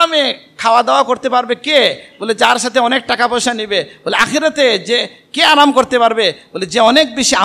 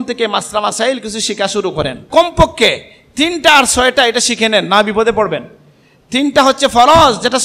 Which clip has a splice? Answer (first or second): second